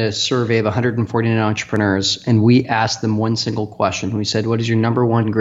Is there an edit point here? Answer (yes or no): no